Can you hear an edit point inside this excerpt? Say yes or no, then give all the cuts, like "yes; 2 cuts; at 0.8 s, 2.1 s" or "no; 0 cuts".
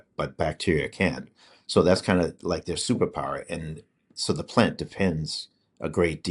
no; 0 cuts